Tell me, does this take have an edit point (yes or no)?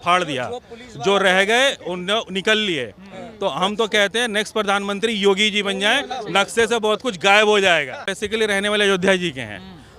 yes